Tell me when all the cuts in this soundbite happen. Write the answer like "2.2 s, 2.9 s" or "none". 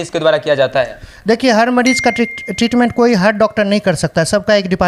none